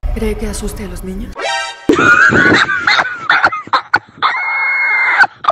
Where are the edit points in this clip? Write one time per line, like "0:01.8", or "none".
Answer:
0:01.5